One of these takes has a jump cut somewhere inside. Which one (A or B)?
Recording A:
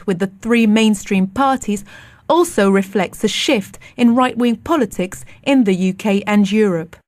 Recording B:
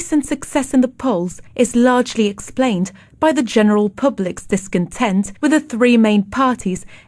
B